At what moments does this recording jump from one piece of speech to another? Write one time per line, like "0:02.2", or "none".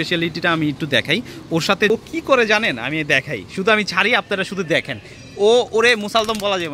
0:01.9